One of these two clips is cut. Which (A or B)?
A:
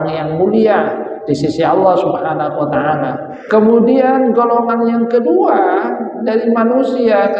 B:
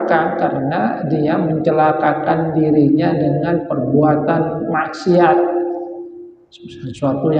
A